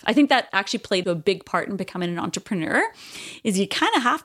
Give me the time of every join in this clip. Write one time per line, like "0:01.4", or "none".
0:01.0